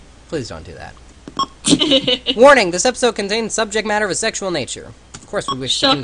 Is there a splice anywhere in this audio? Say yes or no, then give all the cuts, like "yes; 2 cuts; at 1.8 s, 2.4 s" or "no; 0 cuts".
no; 0 cuts